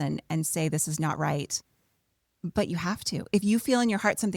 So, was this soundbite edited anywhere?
no; 0 cuts

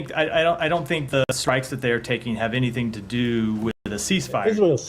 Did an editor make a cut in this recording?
yes; 2 cuts; at 1.2 s, 3.9 s

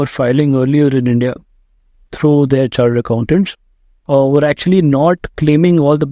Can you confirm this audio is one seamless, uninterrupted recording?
yes; 0 cuts

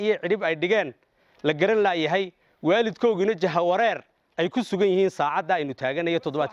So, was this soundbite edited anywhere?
no; 0 cuts

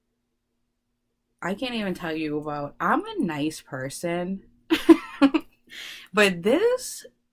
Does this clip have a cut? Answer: no; 0 cuts

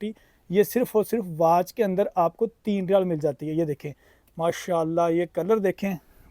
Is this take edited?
no; 0 cuts

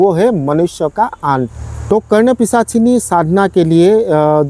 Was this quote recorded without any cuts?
no; 1 cut; at 1.6 s

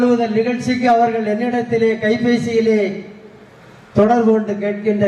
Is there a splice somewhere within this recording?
no; 0 cuts

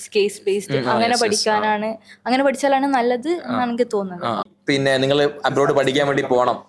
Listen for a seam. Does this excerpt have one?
yes; 1 cut; at 4.4 s

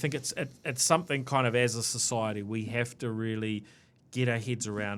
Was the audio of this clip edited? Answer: no; 0 cuts

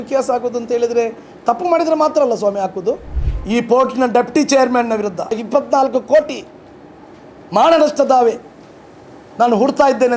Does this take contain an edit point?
yes; 2 cuts; at 3.1 s, 5.4 s

